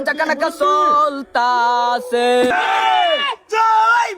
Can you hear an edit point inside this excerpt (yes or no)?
yes